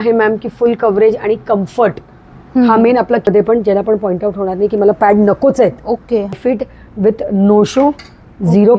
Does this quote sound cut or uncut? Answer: cut